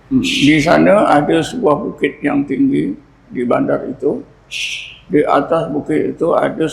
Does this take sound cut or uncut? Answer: uncut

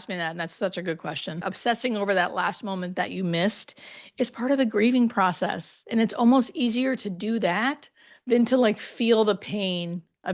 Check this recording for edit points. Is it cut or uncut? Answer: cut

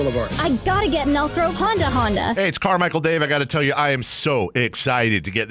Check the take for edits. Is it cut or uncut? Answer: cut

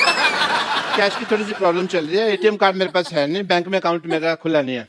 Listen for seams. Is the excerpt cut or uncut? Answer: uncut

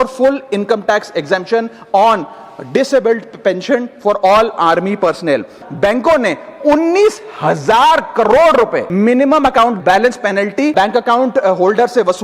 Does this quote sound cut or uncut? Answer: cut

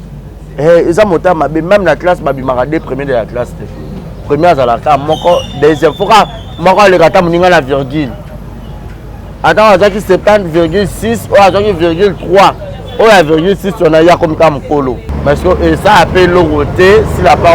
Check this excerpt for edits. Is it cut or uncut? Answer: cut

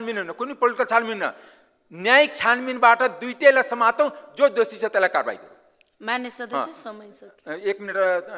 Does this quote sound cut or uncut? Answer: uncut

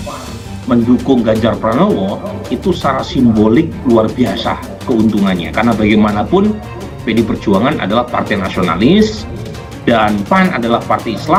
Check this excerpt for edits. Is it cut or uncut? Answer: uncut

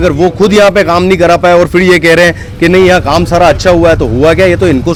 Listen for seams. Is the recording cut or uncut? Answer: uncut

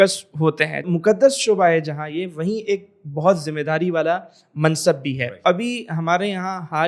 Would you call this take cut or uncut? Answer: cut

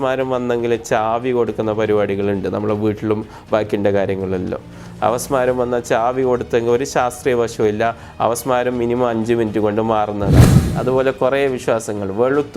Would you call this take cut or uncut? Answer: cut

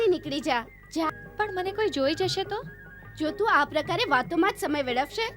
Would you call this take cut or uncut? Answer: cut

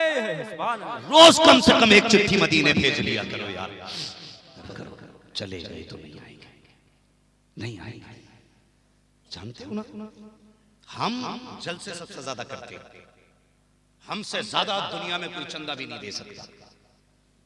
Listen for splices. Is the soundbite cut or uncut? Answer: cut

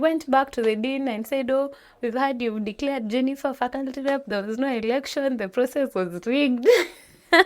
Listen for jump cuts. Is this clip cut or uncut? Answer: uncut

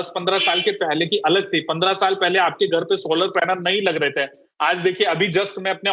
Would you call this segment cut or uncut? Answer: uncut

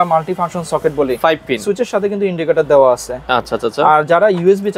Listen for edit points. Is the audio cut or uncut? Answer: uncut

